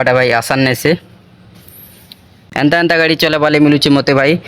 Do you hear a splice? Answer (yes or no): yes